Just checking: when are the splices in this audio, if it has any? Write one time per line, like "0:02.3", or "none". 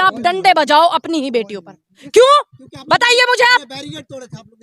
0:02.0